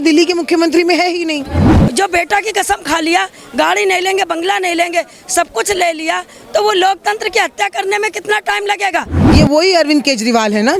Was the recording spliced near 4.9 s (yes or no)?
no